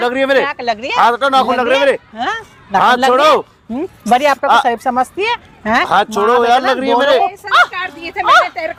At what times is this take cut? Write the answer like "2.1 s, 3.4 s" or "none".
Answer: none